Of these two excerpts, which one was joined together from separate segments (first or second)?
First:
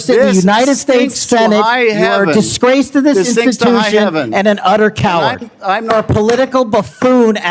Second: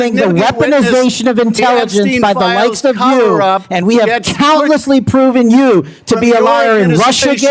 first